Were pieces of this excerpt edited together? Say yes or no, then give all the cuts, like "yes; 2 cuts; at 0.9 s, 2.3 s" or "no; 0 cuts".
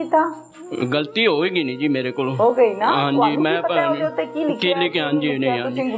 no; 0 cuts